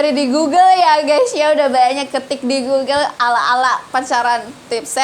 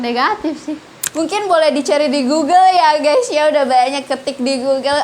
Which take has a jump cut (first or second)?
second